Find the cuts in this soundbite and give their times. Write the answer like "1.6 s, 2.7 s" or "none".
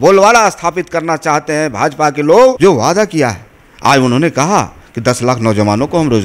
2.6 s